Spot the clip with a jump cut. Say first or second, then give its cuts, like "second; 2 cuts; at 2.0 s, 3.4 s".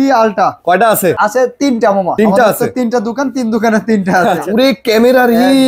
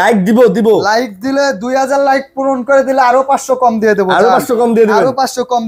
first; 3 cuts; at 1.2 s, 2.1 s, 4.4 s